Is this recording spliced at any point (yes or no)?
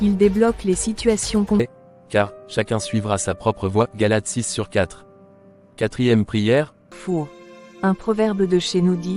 yes